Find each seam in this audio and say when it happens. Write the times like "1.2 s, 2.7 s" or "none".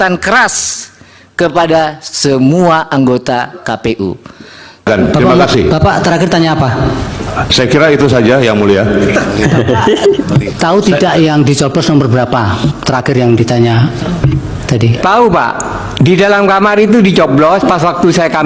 4.9 s